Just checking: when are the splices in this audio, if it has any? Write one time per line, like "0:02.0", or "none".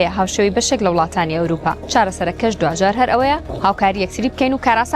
0:01.8
0:03.5